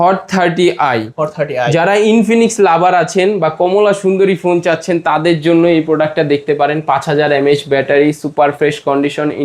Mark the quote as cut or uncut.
uncut